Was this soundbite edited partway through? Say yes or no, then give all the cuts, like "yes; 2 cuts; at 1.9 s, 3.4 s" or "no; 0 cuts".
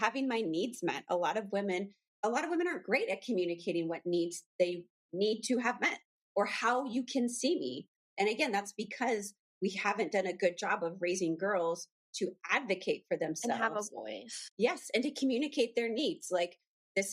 yes; 1 cut; at 2.0 s